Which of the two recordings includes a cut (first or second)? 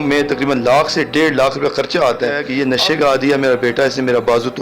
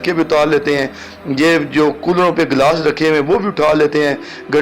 first